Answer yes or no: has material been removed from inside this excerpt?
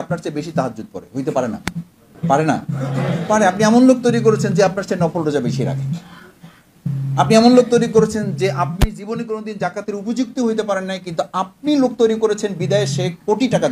yes